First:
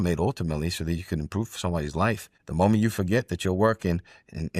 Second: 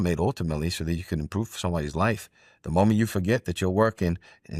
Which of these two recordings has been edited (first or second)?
first